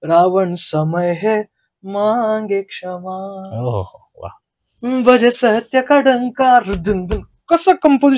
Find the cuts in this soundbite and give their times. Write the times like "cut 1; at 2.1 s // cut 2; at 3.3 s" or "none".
none